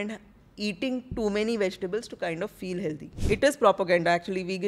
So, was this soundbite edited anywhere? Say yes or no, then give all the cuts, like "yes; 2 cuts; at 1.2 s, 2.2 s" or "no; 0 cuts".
yes; 1 cut; at 3.1 s